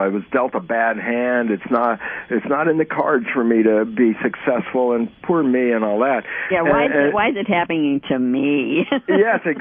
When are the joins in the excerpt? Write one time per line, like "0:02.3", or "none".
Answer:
0:03.4

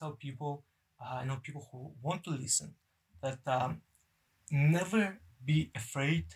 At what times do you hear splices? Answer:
none

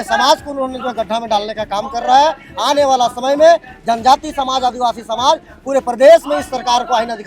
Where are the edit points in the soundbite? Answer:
none

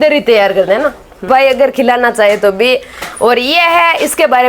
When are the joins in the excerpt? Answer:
0:01.2

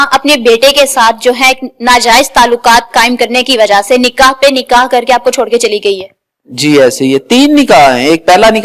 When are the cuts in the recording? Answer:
none

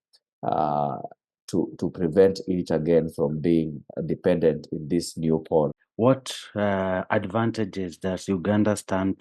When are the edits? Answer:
0:05.8

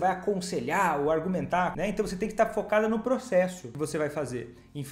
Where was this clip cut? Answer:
0:01.7
0:03.6

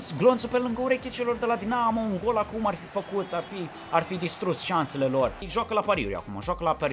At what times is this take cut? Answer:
0:05.4

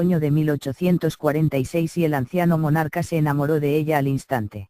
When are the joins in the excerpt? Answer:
0:01.1

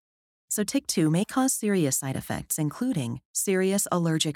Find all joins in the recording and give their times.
none

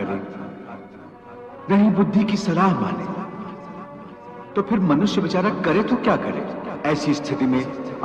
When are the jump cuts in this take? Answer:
0:06.7

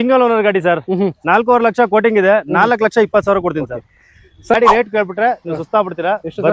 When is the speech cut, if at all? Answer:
0:04.5

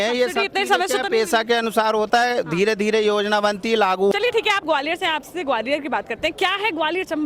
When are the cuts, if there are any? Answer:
0:04.1

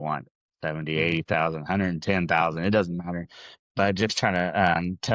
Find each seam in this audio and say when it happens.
none

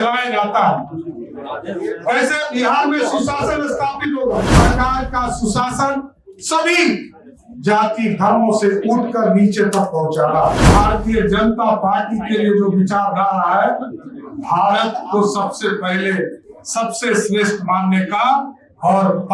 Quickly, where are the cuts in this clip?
0:04.5
0:10.7

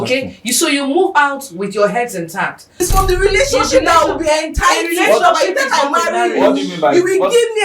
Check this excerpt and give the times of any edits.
0:02.8

